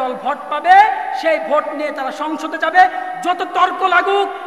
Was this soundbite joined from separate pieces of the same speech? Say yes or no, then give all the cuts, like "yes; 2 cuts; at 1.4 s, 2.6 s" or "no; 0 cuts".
no; 0 cuts